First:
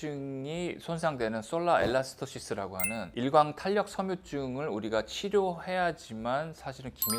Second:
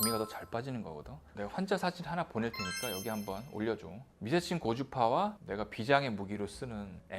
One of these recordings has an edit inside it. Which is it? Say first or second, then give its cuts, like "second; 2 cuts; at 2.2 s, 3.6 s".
second; 1 cut; at 1.3 s